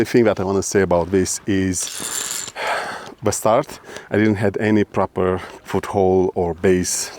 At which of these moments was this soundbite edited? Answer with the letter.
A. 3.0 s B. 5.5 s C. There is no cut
B